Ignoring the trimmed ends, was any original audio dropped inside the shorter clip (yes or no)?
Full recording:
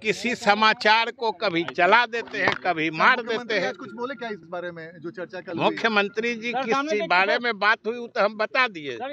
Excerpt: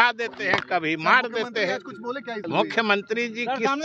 yes